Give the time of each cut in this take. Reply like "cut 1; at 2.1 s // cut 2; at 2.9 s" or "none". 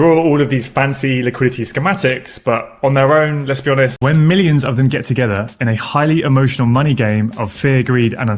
cut 1; at 4.0 s